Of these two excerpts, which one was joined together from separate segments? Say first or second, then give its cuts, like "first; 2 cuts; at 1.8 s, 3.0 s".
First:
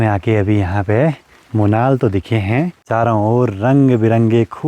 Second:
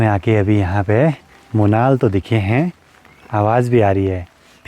first; 1 cut; at 2.9 s